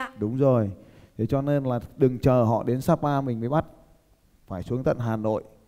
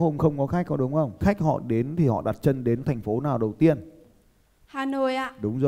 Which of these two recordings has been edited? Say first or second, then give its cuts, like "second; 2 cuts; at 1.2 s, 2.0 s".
second; 2 cuts; at 1.1 s, 4.0 s